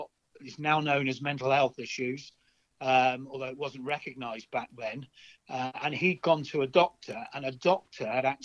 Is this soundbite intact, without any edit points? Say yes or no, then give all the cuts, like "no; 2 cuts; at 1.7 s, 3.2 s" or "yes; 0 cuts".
yes; 0 cuts